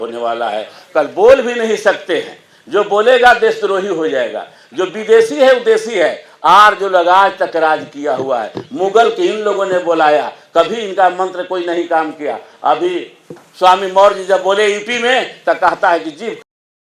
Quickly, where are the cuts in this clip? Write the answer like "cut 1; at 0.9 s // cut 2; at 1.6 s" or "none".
none